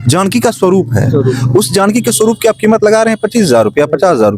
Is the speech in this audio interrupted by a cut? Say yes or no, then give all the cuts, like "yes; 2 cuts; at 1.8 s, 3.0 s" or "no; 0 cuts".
no; 0 cuts